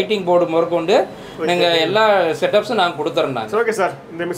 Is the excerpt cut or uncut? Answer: cut